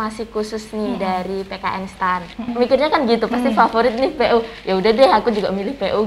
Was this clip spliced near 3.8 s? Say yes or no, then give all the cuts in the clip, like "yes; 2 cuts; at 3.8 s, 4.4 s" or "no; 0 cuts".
no; 1 cut; at 2.5 s